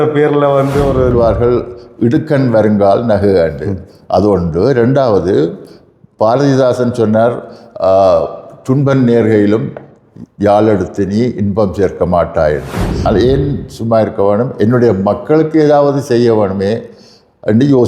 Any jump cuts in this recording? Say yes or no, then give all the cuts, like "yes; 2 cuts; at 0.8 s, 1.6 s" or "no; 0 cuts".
yes; 2 cuts; at 1.1 s, 13.1 s